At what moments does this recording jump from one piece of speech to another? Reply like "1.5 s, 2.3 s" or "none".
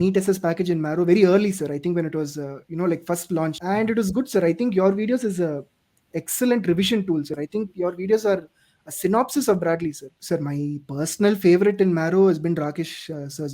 3.6 s, 7.3 s, 10.1 s